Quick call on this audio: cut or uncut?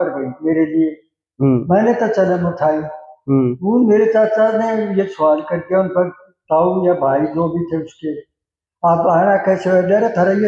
uncut